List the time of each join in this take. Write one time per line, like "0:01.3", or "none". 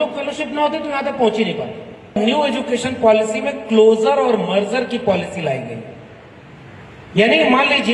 0:02.2